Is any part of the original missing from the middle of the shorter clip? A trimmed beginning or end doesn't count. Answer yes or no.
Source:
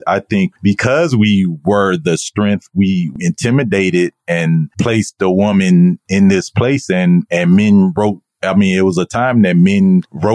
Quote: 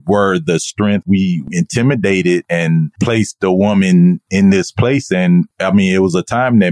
yes